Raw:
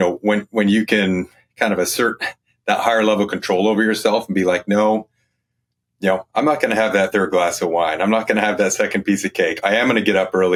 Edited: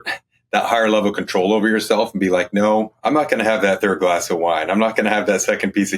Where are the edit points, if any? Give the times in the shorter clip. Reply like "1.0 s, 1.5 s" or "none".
2.9 s